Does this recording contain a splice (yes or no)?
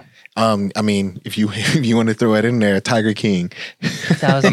no